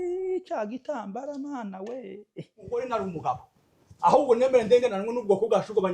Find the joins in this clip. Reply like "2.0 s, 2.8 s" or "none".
2.8 s

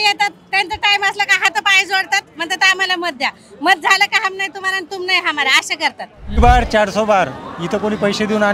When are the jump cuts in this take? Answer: 6.4 s

